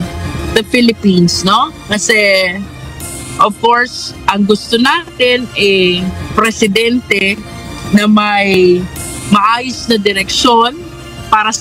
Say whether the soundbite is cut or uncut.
uncut